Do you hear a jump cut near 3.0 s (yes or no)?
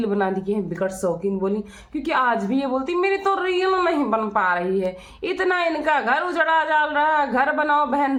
no